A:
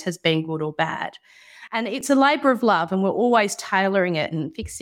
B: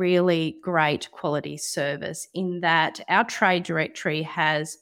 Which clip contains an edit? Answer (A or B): A